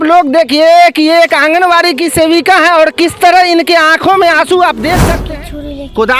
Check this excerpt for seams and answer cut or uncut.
cut